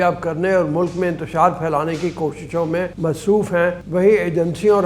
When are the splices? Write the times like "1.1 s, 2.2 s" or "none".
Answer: 2.9 s, 3.8 s

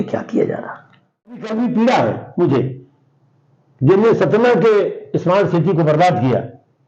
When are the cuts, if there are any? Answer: 1.4 s

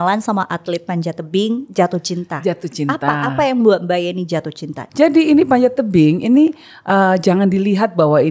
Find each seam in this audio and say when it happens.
4.8 s

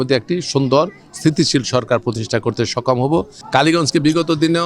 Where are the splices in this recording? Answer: 3.4 s

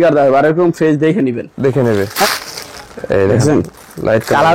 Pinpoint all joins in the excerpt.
2.3 s

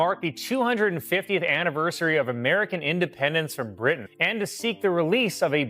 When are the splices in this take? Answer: 4.1 s

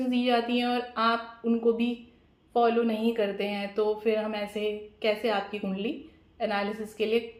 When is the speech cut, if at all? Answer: none

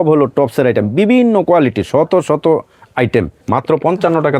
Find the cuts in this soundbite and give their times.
3.4 s

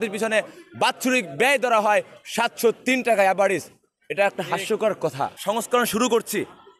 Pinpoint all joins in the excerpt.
5.4 s

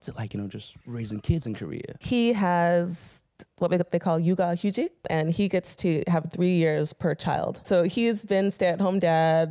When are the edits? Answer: 1.9 s, 5.0 s, 7.6 s

